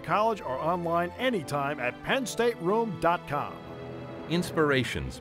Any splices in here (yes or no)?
no